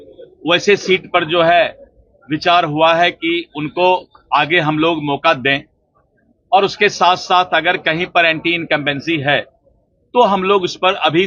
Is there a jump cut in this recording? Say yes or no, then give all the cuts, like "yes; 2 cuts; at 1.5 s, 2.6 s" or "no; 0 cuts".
no; 0 cuts